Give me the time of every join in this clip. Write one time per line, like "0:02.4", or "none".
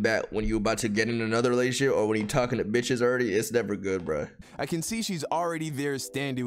0:04.4